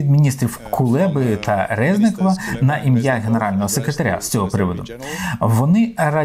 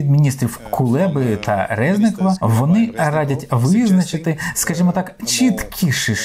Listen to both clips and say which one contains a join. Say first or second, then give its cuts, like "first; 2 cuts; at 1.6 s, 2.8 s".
second; 1 cut; at 2.4 s